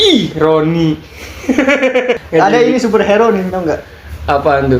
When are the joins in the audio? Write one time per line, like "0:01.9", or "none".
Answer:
0:02.2

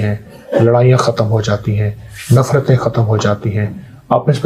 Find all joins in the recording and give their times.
none

